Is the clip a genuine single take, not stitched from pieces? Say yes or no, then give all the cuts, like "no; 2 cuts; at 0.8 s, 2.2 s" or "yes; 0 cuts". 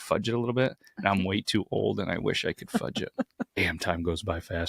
no; 1 cut; at 3.6 s